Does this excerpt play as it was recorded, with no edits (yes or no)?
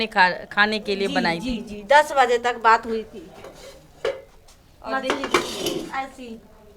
yes